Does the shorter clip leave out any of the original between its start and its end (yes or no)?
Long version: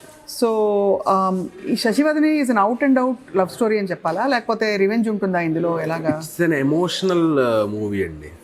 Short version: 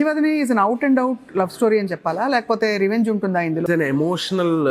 yes